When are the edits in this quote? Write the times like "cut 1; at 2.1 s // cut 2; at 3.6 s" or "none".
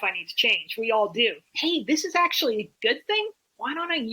cut 1; at 1.5 s